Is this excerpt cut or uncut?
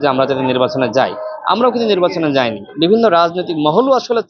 cut